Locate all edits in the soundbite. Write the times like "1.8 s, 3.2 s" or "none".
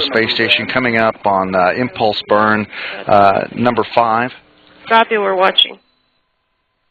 none